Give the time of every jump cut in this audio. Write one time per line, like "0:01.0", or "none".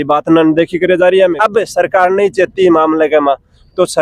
0:01.4

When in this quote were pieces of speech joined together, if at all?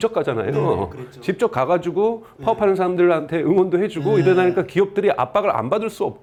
none

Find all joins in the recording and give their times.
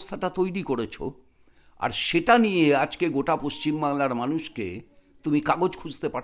none

